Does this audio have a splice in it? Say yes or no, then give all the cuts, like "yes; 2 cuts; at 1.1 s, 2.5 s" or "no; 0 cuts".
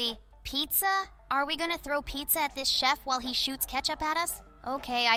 no; 0 cuts